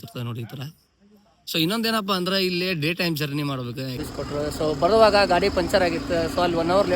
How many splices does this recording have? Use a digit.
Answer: 1